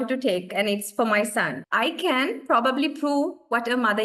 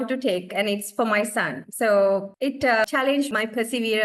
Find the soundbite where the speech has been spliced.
first; 1 cut; at 1.6 s

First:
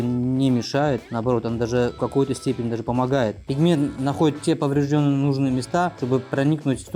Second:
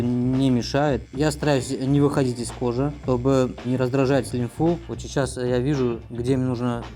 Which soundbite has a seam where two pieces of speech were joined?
second; 2 cuts; at 1.1 s, 4.8 s

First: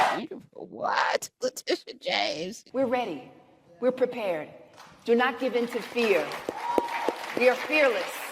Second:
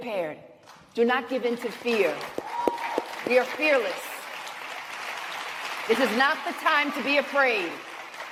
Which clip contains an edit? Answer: first; 1 cut; at 2.5 s

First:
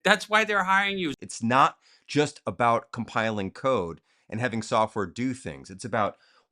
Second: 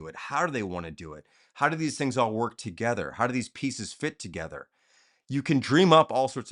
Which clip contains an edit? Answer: first; 1 cut; at 1.1 s

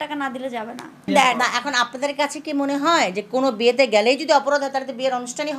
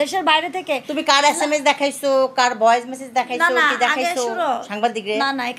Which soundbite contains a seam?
first; 1 cut; at 0.9 s

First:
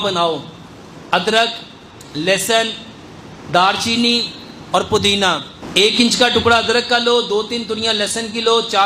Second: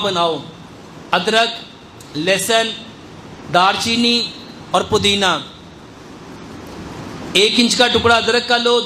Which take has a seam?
first; 1 cut; at 5.6 s

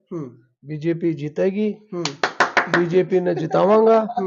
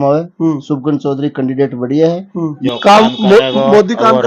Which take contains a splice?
second; 1 cut; at 2.7 s

